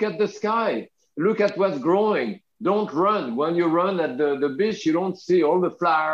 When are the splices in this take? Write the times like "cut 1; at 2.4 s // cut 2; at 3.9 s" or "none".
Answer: cut 1; at 1.0 s